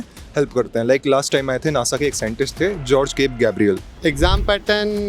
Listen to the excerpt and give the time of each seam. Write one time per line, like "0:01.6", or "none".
0:03.9